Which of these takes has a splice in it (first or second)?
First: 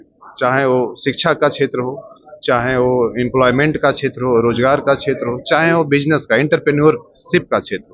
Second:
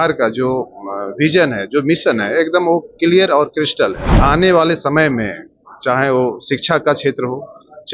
second